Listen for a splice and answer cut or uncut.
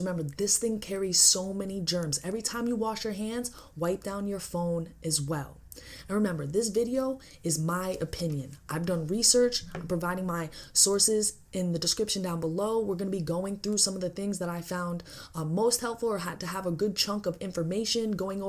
uncut